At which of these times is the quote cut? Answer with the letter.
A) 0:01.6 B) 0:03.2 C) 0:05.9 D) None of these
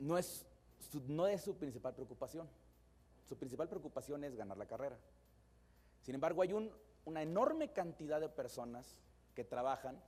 B